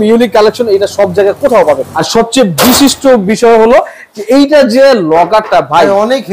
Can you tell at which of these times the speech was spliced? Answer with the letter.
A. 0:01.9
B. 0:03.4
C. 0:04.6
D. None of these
A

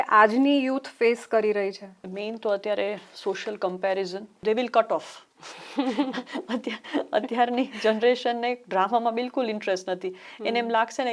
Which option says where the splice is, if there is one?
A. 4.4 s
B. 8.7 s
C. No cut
A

